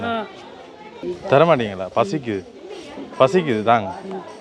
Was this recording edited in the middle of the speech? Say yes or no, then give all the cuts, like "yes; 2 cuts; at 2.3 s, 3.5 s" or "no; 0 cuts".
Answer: yes; 1 cut; at 1.0 s